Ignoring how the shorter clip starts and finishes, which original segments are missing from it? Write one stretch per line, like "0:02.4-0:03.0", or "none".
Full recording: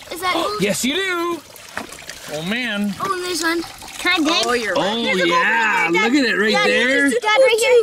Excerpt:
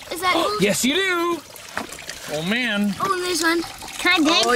none